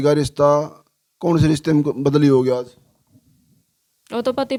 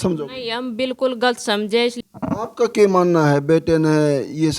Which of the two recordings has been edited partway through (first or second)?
second